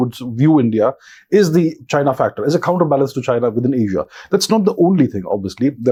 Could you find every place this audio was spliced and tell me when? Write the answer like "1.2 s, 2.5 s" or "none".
none